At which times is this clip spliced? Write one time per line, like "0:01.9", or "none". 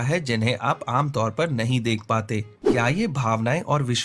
0:02.6